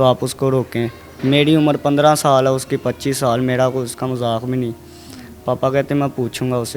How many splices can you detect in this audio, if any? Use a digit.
0